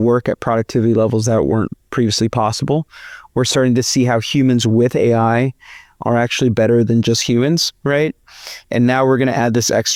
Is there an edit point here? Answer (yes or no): no